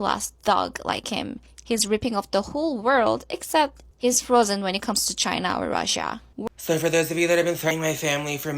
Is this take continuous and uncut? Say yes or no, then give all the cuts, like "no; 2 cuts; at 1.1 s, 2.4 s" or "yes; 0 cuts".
no; 2 cuts; at 6.4 s, 7.7 s